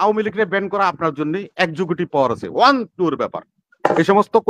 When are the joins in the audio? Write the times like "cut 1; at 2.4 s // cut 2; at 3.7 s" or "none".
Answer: none